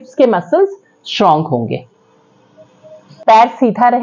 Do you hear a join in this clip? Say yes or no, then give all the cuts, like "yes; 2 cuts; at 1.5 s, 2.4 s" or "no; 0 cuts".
no; 0 cuts